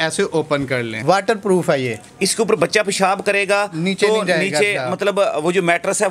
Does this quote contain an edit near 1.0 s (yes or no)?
yes